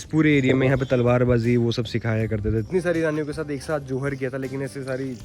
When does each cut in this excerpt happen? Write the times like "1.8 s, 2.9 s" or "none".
2.7 s